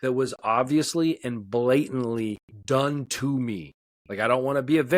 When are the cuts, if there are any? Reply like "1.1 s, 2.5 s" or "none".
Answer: 2.5 s